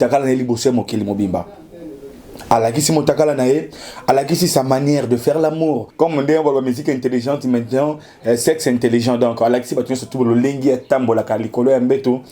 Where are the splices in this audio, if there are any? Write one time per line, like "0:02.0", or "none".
0:05.9